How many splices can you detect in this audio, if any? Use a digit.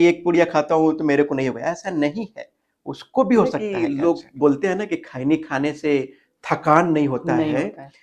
1